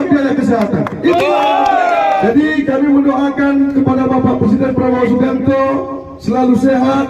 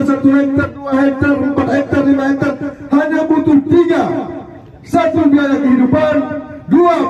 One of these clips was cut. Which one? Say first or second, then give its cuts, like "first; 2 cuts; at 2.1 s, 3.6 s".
first; 1 cut; at 2.2 s